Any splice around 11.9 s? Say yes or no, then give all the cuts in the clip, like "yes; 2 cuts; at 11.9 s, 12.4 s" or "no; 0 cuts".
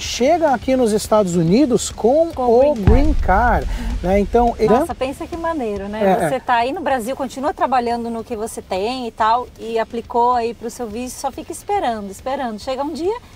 no; 1 cut; at 4.7 s